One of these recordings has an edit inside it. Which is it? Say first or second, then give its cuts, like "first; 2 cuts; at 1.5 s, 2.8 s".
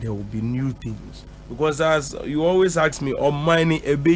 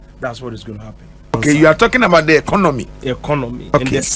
second; 1 cut; at 1.2 s